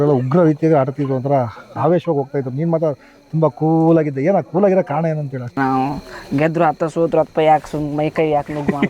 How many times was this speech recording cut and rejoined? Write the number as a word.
one